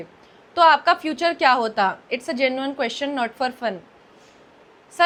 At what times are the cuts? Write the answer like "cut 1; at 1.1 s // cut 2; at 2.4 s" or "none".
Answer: none